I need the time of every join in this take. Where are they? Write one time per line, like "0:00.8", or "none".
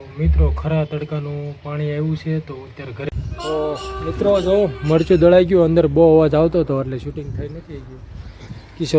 0:03.1